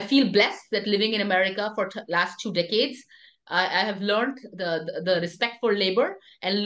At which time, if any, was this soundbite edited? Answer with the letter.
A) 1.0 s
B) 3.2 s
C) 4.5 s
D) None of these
D